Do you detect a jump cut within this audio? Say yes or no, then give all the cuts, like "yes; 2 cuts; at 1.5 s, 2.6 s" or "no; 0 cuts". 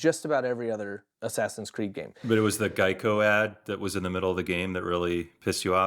yes; 2 cuts; at 1.0 s, 2.3 s